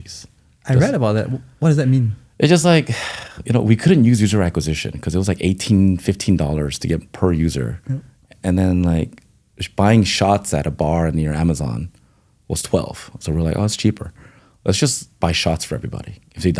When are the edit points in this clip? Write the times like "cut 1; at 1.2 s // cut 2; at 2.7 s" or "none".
none